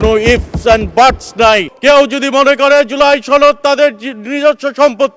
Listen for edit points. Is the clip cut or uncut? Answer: cut